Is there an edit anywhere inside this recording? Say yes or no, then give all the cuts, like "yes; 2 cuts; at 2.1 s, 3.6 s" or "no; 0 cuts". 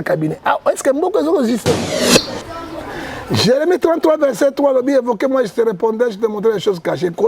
yes; 1 cut; at 1.9 s